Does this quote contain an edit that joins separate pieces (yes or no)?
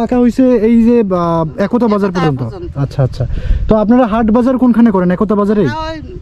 no